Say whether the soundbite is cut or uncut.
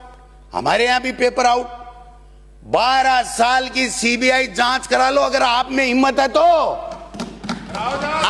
uncut